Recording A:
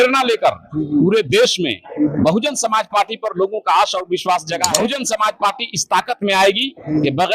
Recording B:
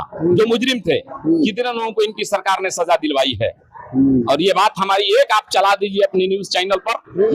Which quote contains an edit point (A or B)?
A